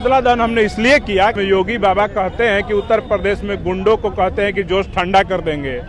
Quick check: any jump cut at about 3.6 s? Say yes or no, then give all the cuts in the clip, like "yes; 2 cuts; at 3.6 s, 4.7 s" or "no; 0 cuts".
no; 1 cut; at 1.3 s